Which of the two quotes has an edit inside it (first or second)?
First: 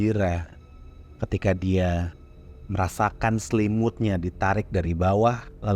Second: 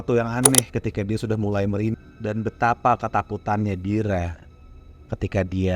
second